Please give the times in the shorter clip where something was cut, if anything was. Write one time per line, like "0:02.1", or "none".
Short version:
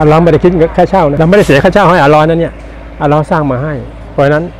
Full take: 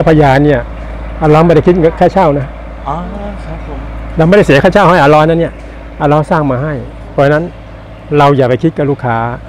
0:01.1